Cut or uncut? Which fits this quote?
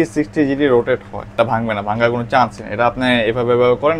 cut